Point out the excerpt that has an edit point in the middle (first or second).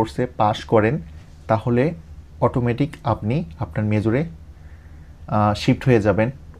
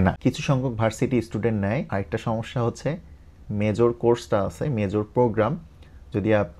second